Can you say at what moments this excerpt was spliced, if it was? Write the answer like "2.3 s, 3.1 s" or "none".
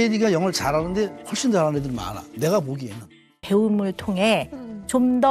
3.4 s